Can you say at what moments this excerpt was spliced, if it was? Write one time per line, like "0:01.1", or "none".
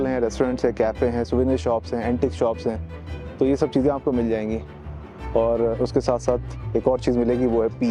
none